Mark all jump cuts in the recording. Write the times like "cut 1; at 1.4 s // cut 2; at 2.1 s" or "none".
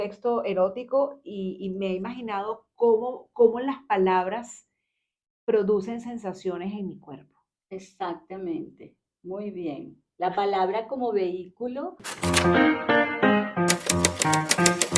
cut 1; at 12.0 s